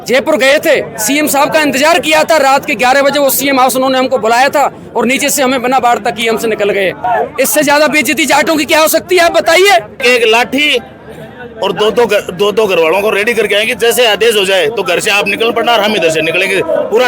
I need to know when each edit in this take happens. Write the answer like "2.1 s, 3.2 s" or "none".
7.0 s, 10.0 s

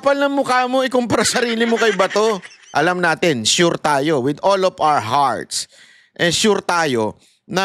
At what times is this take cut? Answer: 2.5 s

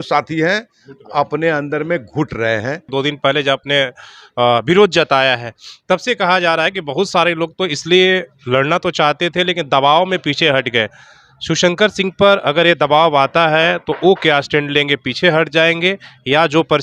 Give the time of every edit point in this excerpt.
2.8 s

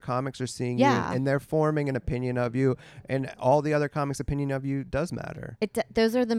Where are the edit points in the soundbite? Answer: none

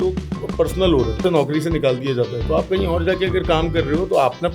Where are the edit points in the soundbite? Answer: 1.2 s

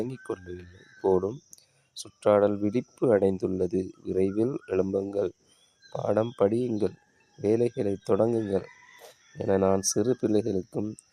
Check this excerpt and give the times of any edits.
none

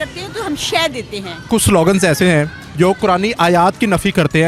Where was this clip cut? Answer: 1.5 s

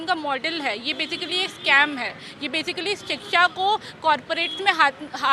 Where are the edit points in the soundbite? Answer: none

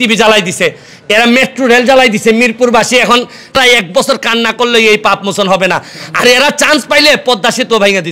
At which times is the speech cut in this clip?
3.6 s

